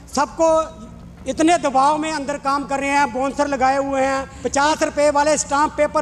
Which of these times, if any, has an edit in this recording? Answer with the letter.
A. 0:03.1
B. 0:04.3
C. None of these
B